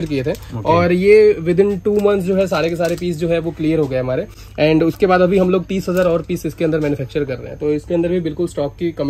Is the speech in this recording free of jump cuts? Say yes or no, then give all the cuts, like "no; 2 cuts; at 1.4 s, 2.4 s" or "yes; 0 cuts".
yes; 0 cuts